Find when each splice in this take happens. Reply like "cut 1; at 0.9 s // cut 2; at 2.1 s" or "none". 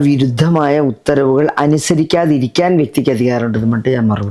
none

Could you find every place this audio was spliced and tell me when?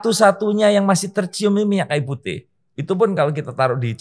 none

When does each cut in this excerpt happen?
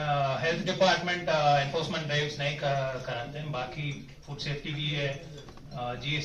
none

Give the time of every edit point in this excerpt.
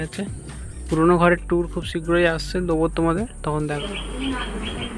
cut 1; at 3.8 s

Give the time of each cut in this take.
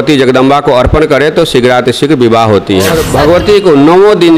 cut 1; at 3.0 s

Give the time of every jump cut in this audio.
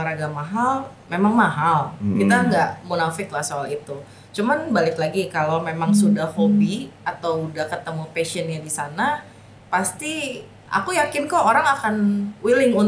none

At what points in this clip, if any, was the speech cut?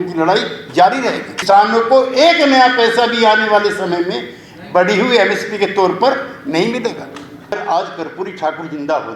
cut 1; at 1.3 s // cut 2; at 7.5 s

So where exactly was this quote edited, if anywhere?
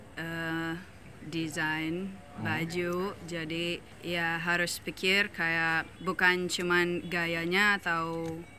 cut 1; at 3.9 s // cut 2; at 5.9 s

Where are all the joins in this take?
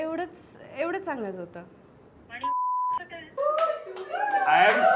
cut 1; at 3.3 s

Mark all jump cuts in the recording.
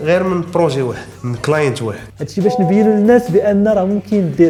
none

